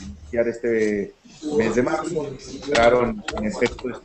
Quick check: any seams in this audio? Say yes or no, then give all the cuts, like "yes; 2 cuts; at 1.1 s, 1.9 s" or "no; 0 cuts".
yes; 1 cut; at 1.9 s